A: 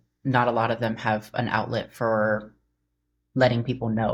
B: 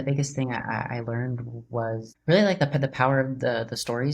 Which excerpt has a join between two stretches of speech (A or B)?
B